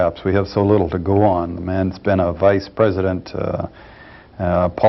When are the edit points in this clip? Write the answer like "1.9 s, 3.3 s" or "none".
2.7 s